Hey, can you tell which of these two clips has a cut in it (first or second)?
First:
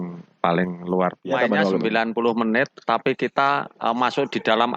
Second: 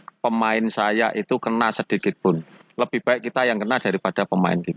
first